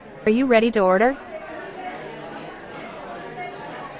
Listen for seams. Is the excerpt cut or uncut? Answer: cut